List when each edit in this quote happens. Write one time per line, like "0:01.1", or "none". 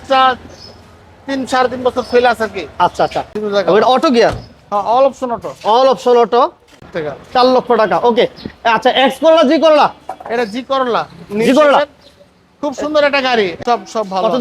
0:03.3
0:06.9
0:13.6